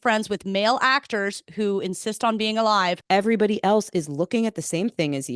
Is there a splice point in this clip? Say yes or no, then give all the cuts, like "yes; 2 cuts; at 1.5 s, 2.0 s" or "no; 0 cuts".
yes; 1 cut; at 3.0 s